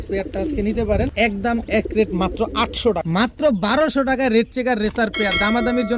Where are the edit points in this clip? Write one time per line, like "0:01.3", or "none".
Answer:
0:01.1
0:03.0